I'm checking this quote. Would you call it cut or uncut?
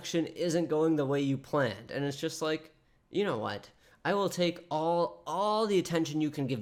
uncut